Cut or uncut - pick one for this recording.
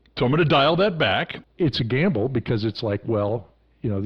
cut